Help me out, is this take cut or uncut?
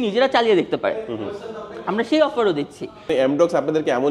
cut